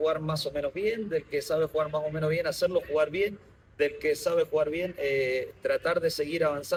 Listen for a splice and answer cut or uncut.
uncut